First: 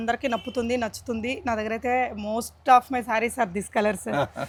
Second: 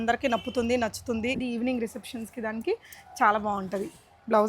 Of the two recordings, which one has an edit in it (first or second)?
second